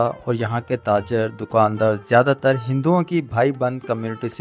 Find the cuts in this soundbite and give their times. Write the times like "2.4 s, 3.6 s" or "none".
none

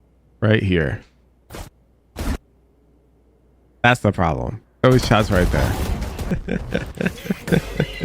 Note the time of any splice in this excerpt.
6.4 s

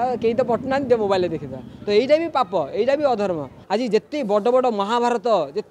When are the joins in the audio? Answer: 3.6 s

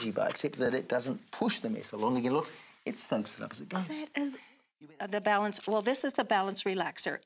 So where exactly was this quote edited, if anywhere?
4.7 s

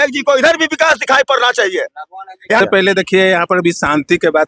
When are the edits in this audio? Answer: 2.6 s

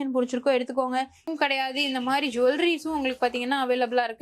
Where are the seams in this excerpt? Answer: 1.3 s

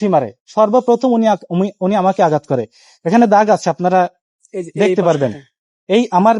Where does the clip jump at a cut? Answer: none

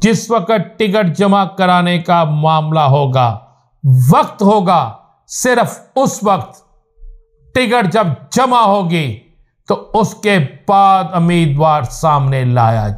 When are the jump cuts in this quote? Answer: none

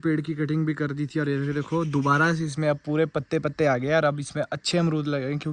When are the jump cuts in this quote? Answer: none

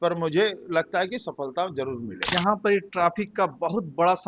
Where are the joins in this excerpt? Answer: 2.3 s

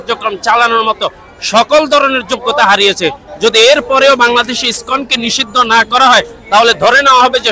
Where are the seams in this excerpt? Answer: none

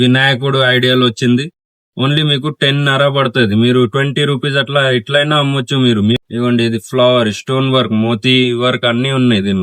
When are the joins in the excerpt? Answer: 6.2 s

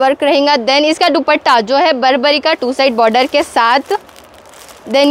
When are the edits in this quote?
none

